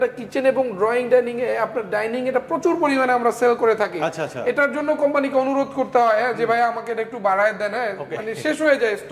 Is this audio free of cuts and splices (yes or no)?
yes